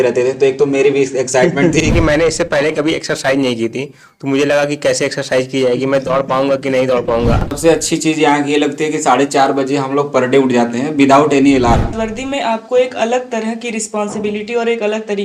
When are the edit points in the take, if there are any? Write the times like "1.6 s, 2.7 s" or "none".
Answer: 1.9 s, 7.6 s, 12.1 s